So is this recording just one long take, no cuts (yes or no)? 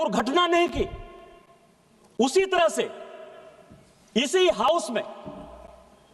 yes